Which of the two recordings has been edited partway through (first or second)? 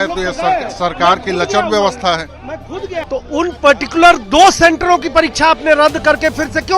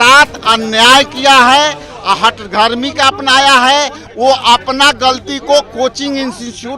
first